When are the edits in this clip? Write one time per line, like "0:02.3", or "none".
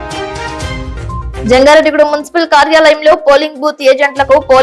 none